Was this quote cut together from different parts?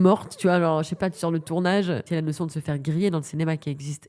yes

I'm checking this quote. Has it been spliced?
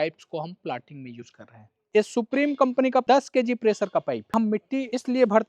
yes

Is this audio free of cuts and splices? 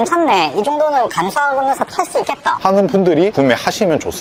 yes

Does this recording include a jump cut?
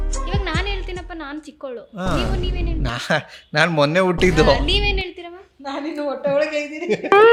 no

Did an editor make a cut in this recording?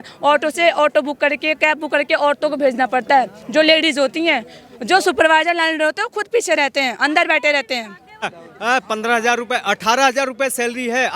yes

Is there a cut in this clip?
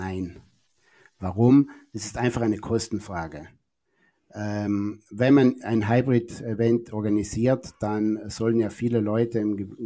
no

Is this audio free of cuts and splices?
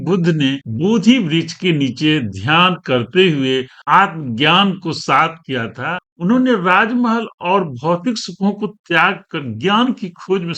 no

